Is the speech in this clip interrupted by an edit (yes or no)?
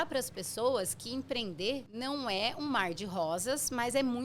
yes